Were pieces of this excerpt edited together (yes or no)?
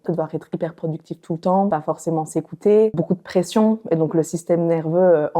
yes